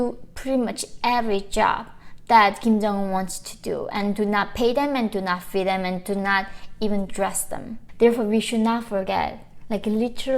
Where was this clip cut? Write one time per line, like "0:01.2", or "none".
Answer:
0:07.8